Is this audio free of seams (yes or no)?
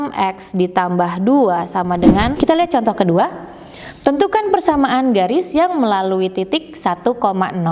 no